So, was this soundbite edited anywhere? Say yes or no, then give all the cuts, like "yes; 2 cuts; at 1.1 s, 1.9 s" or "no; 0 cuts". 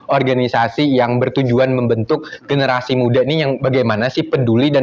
no; 0 cuts